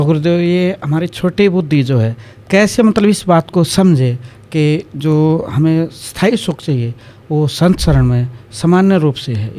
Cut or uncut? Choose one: uncut